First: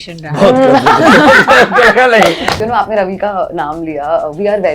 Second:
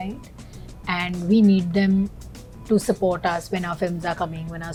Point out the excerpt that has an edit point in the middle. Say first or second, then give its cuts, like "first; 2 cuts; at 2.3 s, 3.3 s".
first; 1 cut; at 2.5 s